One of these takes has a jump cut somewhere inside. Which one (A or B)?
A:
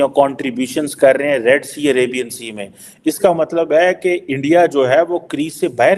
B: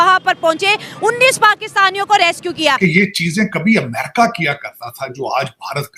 B